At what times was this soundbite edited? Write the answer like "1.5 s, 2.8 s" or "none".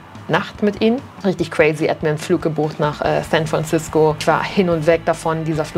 1.1 s